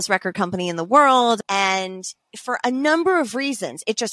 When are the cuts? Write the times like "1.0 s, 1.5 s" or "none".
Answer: 1.4 s

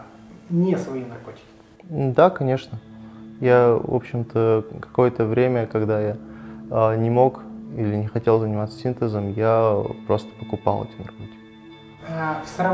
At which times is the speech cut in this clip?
11.8 s

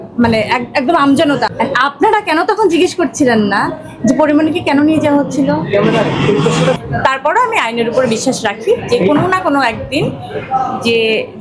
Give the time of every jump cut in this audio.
1.5 s, 6.8 s

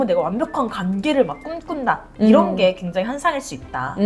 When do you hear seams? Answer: none

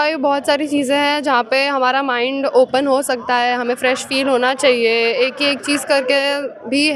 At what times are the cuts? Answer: none

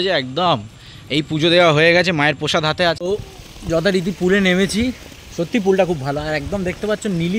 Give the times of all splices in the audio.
3.0 s

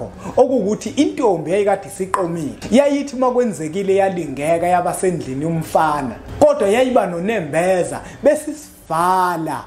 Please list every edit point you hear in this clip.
2.5 s, 6.2 s

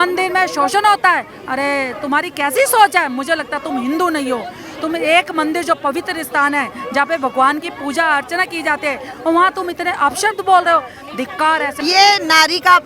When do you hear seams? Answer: 11.7 s

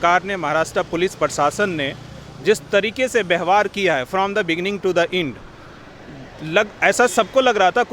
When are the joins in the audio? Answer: none

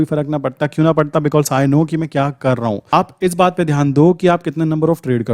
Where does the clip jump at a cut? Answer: 2.9 s

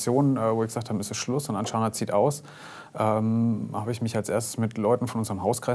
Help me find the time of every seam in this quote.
none

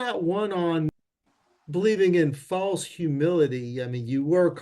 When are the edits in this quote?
0.9 s

